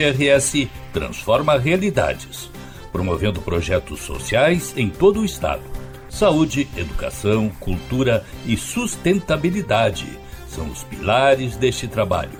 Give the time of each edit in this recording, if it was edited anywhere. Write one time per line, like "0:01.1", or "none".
none